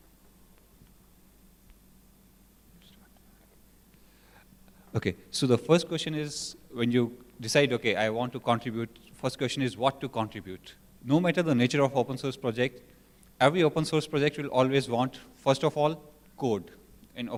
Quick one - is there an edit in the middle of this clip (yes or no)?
no